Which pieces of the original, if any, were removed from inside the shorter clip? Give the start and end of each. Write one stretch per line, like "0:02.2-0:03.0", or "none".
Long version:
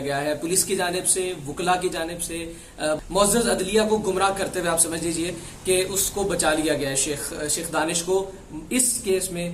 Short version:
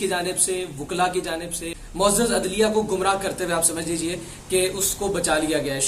0:02.6-0:03.0